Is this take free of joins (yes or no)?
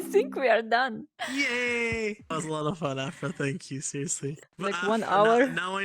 no